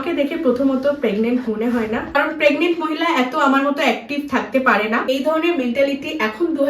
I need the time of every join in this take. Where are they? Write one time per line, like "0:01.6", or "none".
0:02.2
0:05.0

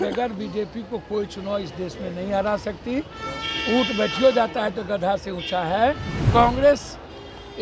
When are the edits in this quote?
0:06.1

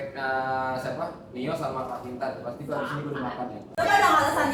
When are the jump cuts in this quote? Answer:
none

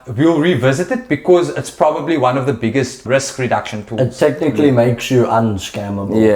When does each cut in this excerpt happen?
0:03.0

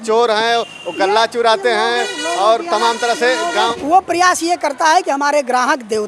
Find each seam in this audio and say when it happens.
0:03.7

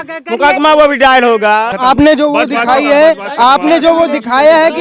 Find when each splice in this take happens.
0:01.7

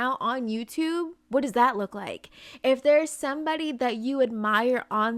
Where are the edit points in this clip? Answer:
none

